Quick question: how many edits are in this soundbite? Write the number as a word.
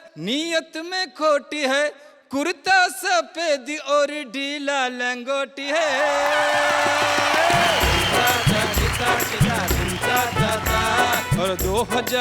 one